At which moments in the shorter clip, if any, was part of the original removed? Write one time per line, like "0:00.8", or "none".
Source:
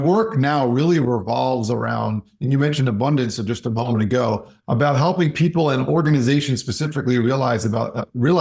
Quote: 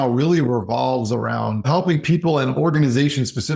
0:01.7